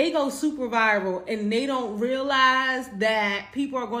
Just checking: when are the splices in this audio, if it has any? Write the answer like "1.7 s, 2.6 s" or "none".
none